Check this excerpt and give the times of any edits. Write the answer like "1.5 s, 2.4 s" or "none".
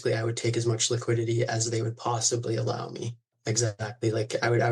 3.3 s